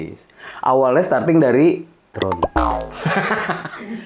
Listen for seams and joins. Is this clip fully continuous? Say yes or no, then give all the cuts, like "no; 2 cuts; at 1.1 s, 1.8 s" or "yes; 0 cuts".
no; 1 cut; at 2.1 s